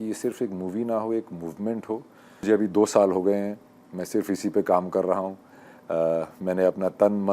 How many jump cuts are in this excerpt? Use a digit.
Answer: 1